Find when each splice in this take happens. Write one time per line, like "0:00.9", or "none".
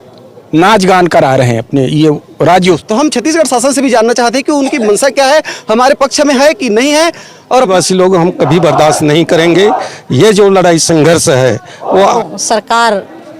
0:02.8
0:07.7
0:12.2